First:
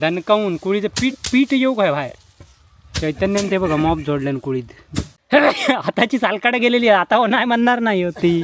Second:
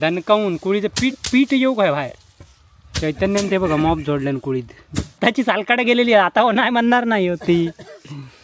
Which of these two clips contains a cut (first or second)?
second